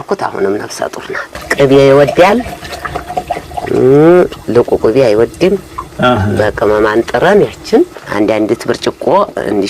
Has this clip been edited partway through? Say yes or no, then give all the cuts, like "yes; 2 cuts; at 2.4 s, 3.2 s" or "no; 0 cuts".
yes; 2 cuts; at 1.3 s, 8.0 s